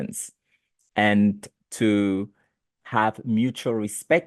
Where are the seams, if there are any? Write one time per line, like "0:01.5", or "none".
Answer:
0:02.6